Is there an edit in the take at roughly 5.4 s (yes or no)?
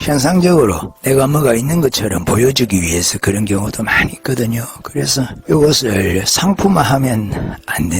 yes